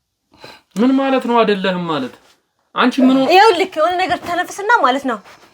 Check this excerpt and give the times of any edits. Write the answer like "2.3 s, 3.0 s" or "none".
none